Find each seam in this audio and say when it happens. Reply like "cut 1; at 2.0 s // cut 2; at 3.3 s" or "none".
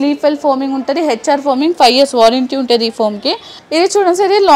cut 1; at 3.5 s